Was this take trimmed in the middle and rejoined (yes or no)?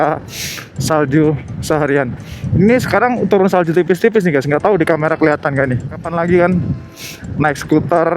yes